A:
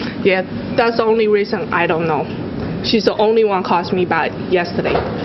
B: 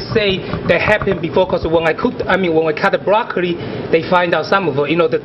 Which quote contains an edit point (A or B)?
A